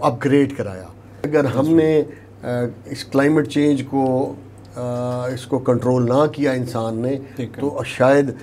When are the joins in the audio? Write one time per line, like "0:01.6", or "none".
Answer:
0:01.3